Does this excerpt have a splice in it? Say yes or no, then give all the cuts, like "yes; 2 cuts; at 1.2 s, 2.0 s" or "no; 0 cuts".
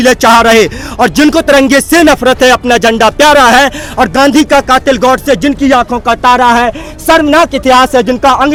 no; 0 cuts